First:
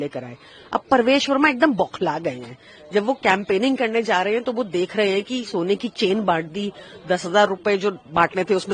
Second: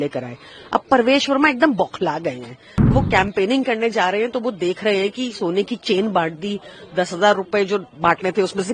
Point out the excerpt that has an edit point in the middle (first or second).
second